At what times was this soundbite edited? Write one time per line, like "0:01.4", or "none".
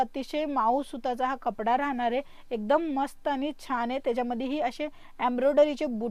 none